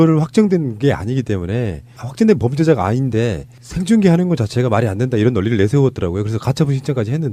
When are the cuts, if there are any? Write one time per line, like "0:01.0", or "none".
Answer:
0:02.2